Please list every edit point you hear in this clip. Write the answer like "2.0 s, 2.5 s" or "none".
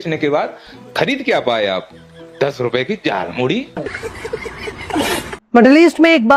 5.3 s